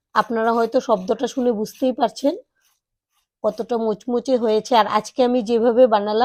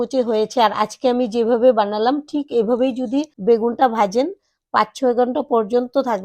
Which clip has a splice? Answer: second; 1 cut; at 3.3 s

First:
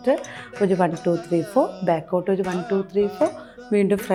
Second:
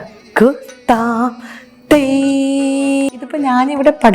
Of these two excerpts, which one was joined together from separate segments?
second; 1 cut; at 3.2 s

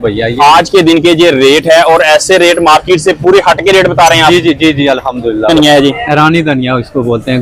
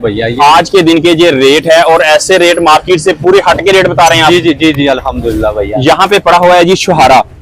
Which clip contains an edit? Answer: first; 1 cut; at 5.5 s

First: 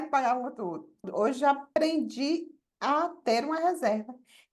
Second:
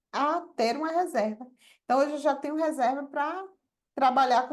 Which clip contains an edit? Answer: first; 2 cuts; at 1.1 s, 1.7 s

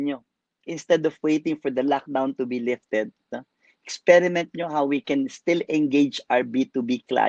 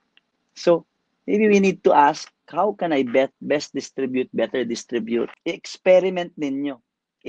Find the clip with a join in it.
second; 1 cut; at 5.4 s

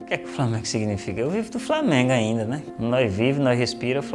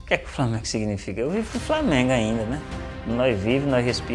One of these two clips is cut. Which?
first; 1 cut; at 2.6 s

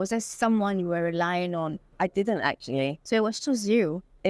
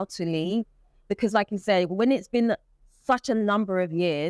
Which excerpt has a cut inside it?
first; 1 cut; at 1.8 s

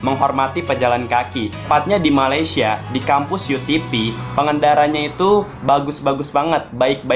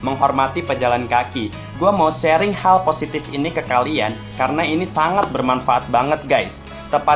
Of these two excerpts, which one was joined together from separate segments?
first; 1 cut; at 1.7 s

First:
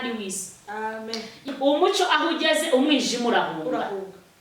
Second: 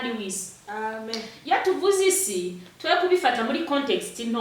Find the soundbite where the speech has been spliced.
first; 1 cut; at 1.4 s

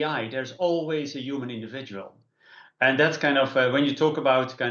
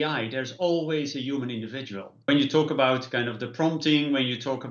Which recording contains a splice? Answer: second; 1 cut; at 2.3 s

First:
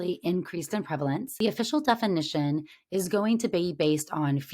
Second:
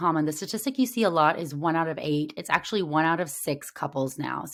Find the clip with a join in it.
first; 1 cut; at 1.3 s

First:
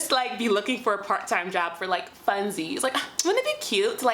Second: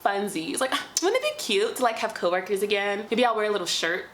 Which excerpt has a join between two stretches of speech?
second; 1 cut; at 3.0 s

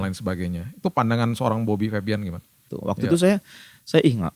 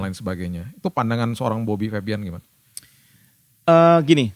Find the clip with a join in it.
first; 1 cut; at 2.7 s

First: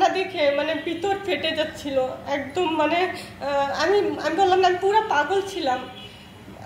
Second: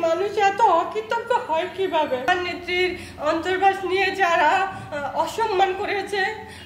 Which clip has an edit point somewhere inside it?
second; 1 cut; at 2.3 s

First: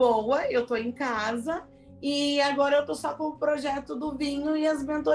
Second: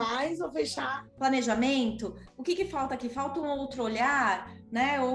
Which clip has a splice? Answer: second; 1 cut; at 1.0 s

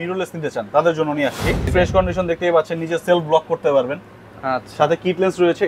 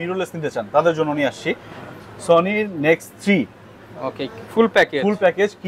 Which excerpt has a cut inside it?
first; 1 cut; at 1.7 s

